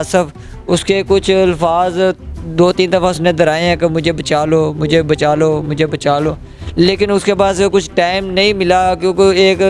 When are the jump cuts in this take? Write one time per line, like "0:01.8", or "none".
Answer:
none